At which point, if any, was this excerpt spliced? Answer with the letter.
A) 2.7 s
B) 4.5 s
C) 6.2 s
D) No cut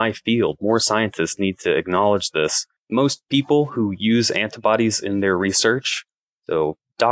A